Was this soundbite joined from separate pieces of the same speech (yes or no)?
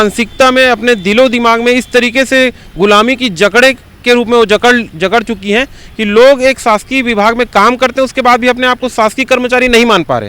no